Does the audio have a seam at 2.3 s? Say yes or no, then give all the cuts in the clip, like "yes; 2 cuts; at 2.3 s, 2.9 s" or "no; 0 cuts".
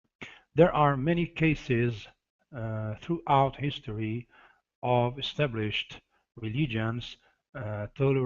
yes; 1 cut; at 2.3 s